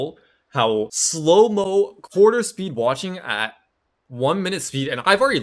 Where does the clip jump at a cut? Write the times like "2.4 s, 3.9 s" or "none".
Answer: 1.0 s